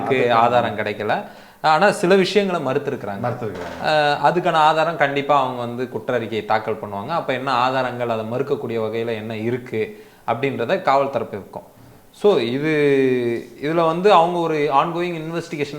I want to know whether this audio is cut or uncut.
uncut